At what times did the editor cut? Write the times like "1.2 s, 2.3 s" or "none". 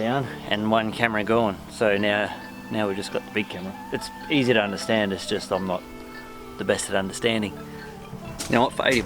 4.1 s, 8.0 s

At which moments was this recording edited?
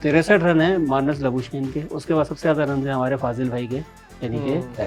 none

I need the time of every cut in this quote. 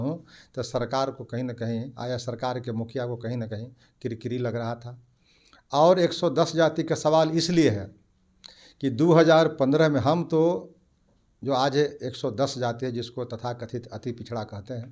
none

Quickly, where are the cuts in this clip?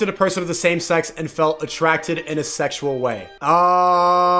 3.3 s

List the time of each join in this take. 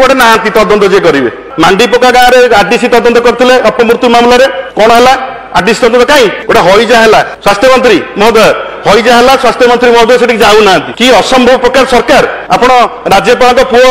1.4 s, 4.6 s, 6.4 s, 7.3 s, 10.9 s, 12.4 s

